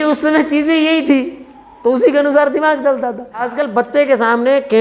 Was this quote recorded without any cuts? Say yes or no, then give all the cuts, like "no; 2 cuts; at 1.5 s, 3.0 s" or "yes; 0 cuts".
no; 1 cut; at 3.5 s